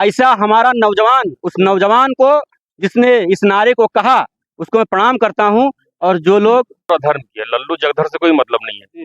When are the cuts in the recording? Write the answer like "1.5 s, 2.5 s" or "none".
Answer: 6.9 s